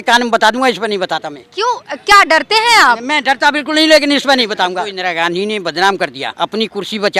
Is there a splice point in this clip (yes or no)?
yes